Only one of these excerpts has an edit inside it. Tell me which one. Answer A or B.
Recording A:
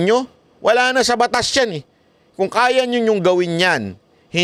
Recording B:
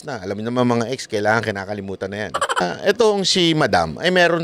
B